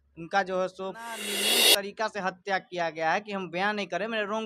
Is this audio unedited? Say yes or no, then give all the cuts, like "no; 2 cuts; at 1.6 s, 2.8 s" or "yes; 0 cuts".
no; 1 cut; at 1.5 s